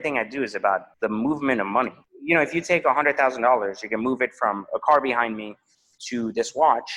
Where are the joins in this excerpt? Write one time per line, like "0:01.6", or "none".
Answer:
0:00.9
0:02.1